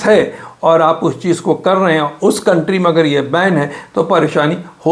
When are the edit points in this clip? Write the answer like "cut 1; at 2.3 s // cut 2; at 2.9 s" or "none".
none